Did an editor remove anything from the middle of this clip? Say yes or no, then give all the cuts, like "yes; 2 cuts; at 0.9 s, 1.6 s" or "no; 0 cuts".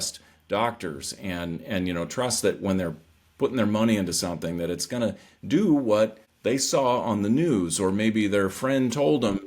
yes; 1 cut; at 6.3 s